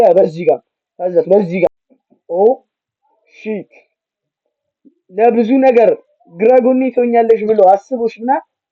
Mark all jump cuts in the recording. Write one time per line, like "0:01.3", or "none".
0:01.9